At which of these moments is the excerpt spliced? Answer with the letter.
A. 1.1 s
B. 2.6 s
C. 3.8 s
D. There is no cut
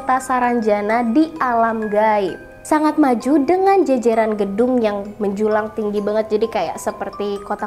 B